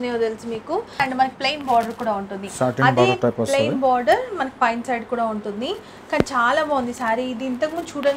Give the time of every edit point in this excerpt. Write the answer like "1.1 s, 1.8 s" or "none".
1.0 s